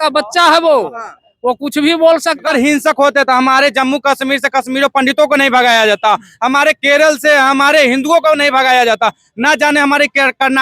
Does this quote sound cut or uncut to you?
cut